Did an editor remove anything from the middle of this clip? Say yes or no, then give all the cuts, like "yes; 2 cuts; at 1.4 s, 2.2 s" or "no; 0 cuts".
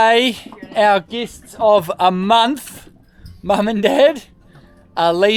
no; 0 cuts